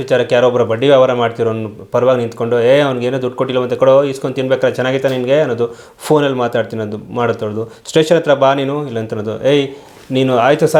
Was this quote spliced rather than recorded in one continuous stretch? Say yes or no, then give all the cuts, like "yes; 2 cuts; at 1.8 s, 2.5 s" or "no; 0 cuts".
no; 0 cuts